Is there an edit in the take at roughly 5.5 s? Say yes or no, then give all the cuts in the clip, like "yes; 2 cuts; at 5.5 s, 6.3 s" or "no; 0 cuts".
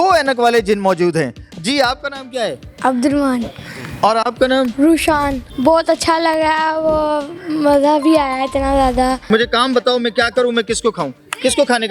yes; 2 cuts; at 5.5 s, 9.3 s